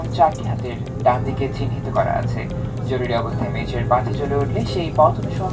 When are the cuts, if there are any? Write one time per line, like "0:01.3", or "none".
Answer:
none